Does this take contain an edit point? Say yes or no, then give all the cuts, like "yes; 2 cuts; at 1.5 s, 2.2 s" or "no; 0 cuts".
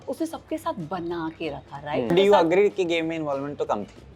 yes; 1 cut; at 2.1 s